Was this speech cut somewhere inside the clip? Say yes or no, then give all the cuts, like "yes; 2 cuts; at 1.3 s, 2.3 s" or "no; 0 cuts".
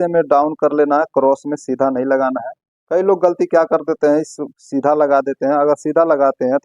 no; 0 cuts